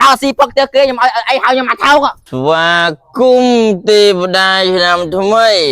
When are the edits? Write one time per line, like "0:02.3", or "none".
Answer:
0:02.2